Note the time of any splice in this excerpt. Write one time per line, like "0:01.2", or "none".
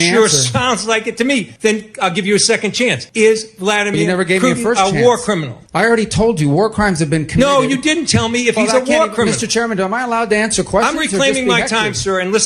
0:01.5
0:03.0
0:05.6